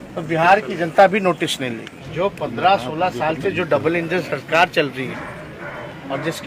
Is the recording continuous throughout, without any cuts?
no; 1 cut; at 1.9 s

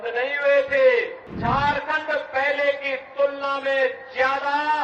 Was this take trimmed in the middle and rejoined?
yes; 1 cut; at 1.2 s

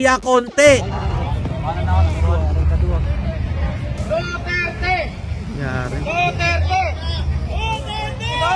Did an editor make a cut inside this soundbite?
no; 0 cuts

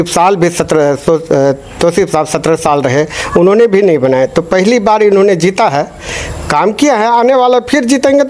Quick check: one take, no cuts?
yes; 0 cuts

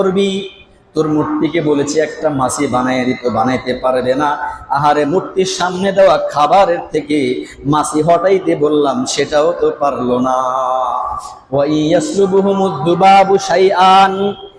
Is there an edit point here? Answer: no; 0 cuts

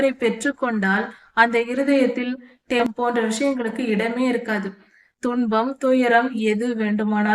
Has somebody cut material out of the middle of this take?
yes; 1 cut; at 2.8 s

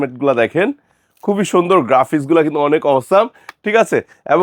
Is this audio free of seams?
yes; 0 cuts

